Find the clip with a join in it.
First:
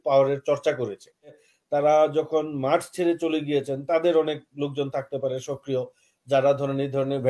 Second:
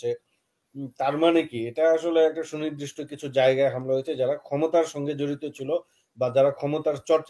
first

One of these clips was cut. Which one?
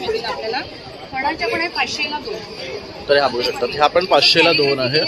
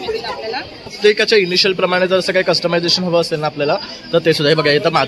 second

